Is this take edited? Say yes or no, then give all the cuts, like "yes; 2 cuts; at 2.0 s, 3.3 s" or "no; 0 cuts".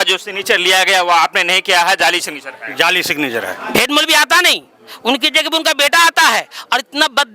yes; 1 cut; at 3.6 s